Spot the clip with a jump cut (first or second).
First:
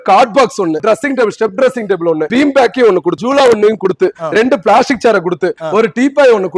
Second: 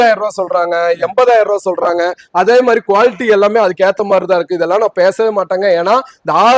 first